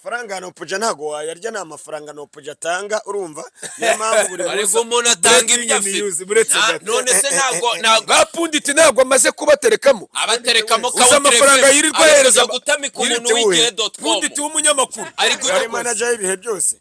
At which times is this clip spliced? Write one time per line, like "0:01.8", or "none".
0:15.4